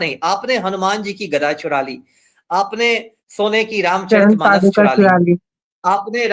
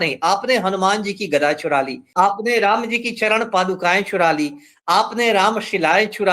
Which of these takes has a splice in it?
second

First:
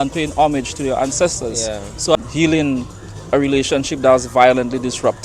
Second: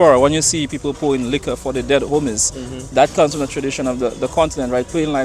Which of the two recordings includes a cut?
first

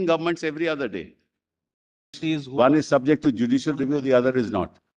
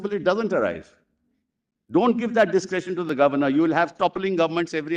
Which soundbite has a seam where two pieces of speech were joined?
first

